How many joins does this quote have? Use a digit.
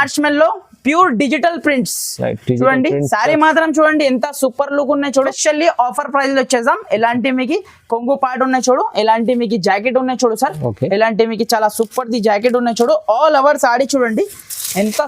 1